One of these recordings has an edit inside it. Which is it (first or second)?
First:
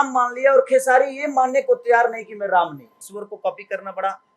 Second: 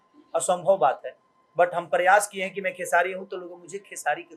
first